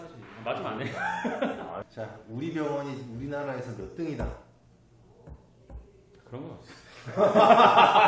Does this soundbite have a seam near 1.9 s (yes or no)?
yes